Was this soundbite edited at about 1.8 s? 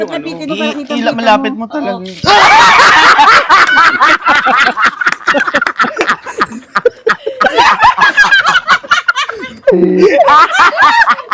no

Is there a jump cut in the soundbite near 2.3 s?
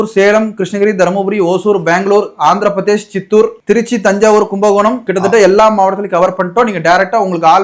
no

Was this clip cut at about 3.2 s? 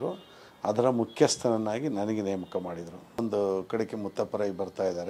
yes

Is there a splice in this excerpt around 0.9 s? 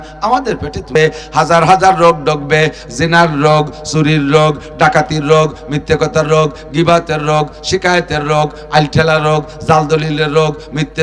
yes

